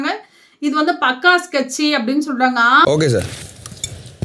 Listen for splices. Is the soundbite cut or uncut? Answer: cut